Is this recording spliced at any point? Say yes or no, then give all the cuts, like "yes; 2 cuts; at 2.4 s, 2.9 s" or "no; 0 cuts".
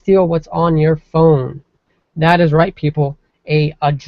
yes; 1 cut; at 2.5 s